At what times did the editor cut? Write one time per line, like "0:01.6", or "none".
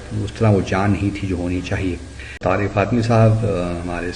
0:02.4